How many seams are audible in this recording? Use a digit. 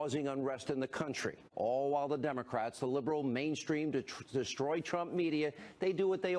0